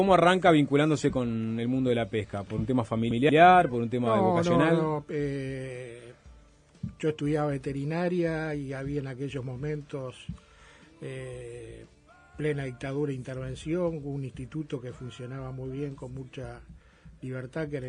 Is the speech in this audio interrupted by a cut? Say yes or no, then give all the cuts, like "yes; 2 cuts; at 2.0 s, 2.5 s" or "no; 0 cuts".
yes; 1 cut; at 6.6 s